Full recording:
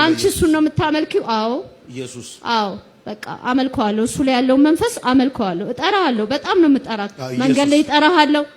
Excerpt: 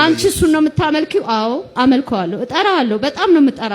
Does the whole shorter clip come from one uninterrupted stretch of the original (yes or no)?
no